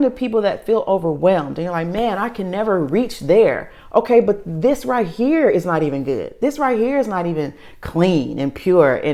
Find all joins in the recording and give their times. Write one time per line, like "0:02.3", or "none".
none